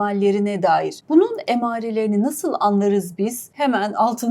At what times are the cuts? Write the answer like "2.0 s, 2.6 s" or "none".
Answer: 1.0 s, 3.5 s